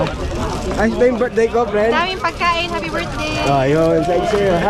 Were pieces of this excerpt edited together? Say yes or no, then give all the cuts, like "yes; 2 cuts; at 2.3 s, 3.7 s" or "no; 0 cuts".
no; 0 cuts